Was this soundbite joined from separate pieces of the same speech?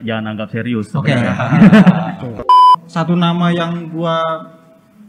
yes; 1 cut; at 2.5 s

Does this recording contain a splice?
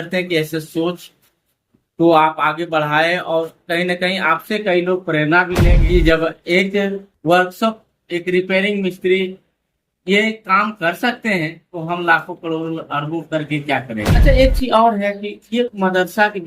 yes; 2 cuts; at 5.7 s, 14.2 s

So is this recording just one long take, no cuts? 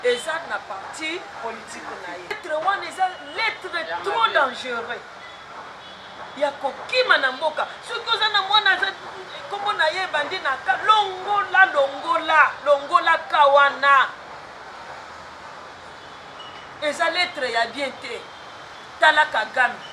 no; 1 cut; at 2.4 s

